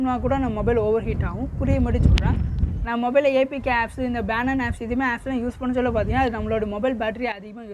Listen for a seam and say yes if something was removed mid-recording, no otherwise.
no